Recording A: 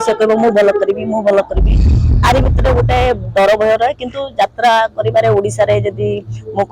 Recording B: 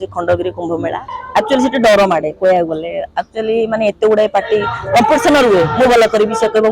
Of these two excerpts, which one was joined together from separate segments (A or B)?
B